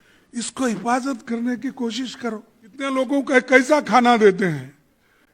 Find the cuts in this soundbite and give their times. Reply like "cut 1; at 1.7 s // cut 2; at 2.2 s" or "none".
cut 1; at 2.9 s